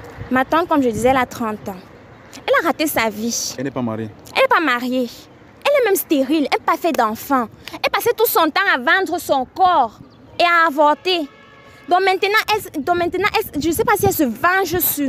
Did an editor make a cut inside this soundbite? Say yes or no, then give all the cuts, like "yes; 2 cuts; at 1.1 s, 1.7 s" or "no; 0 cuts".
no; 0 cuts